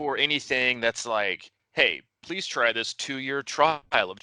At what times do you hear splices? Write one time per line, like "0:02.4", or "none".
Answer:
0:01.5